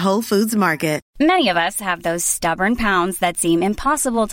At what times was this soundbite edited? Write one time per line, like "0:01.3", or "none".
0:01.1

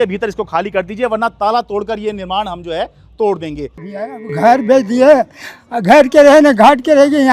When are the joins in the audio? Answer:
0:04.1

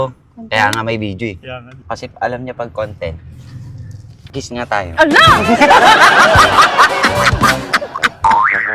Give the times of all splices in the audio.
0:01.8

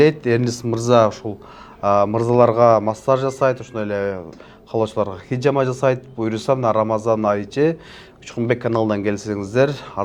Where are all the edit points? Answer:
none

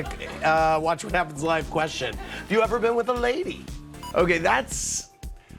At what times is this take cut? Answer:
0:03.9

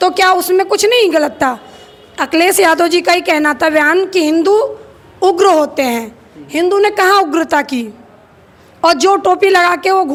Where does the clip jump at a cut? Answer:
none

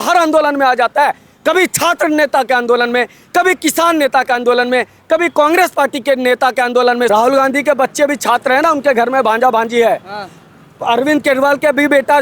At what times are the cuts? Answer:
0:07.1

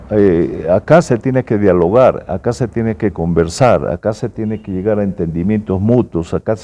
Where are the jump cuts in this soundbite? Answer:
none

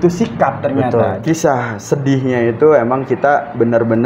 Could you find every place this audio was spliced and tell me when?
0:01.2

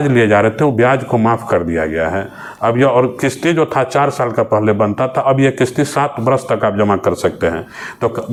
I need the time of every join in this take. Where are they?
none

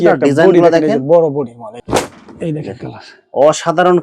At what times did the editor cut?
0:01.7

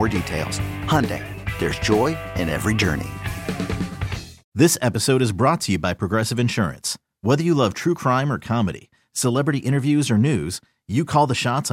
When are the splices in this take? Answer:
0:04.4

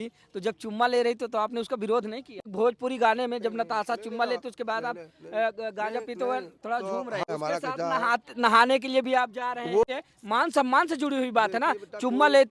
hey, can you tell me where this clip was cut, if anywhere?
0:02.4
0:07.3
0:09.8

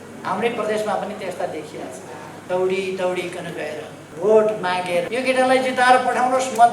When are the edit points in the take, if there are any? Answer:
0:02.3
0:04.0
0:05.1

